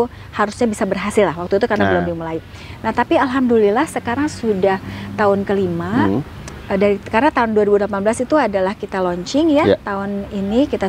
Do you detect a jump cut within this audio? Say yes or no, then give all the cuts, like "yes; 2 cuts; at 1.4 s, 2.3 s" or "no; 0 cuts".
no; 0 cuts